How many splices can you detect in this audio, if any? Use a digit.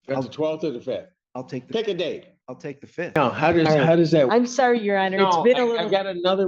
1